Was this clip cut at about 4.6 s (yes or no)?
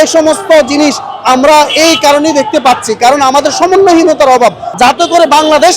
yes